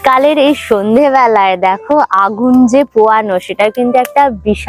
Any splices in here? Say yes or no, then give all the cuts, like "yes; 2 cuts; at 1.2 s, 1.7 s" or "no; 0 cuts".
no; 0 cuts